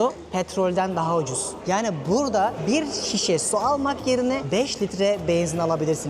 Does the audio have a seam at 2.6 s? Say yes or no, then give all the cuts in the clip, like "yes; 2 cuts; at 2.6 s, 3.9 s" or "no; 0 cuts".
yes; 3 cuts; at 1.5 s, 2.6 s, 4.4 s